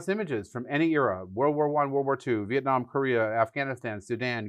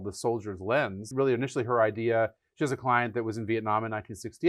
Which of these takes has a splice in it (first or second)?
second